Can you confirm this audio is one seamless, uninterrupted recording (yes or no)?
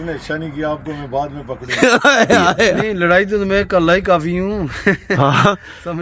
no